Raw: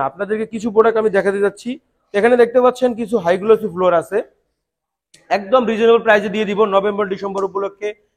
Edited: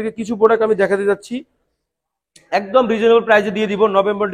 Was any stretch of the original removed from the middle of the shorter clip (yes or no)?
yes